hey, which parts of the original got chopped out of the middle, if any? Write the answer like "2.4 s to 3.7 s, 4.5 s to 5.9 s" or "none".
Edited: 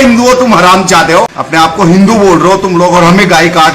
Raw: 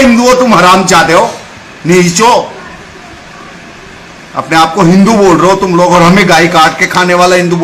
1.4 s to 4.4 s